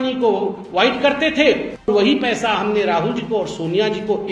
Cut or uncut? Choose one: cut